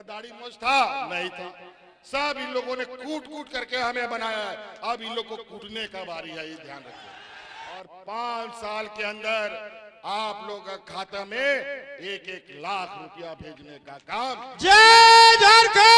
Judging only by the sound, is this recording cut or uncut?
cut